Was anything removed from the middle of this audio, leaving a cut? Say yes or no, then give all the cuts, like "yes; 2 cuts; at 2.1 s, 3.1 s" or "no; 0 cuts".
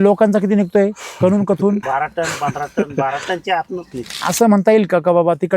yes; 2 cuts; at 1.8 s, 4.3 s